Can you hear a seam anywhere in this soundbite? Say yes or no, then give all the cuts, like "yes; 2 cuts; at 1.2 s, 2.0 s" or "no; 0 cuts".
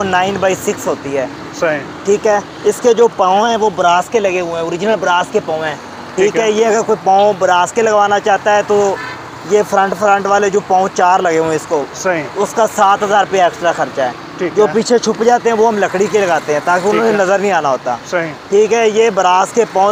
no; 0 cuts